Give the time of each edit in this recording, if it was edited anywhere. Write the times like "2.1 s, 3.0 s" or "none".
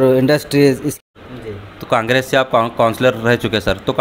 1.0 s